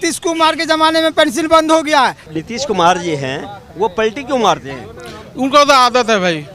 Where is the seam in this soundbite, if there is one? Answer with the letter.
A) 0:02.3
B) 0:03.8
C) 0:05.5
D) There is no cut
A